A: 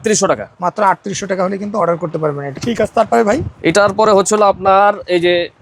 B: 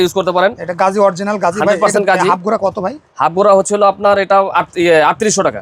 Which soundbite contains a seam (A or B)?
A